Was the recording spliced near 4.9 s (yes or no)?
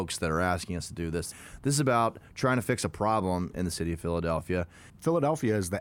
yes